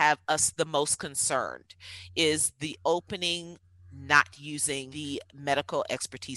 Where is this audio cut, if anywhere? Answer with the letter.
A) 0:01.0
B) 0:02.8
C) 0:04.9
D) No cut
C